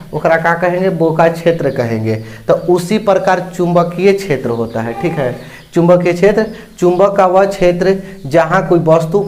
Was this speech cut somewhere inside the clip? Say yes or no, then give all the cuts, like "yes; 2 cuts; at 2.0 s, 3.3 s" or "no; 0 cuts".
no; 0 cuts